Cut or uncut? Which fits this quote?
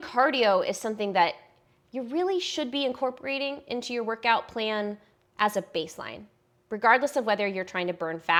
uncut